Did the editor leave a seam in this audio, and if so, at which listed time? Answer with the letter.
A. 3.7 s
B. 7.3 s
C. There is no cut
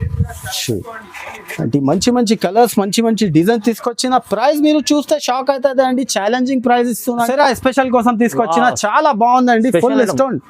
B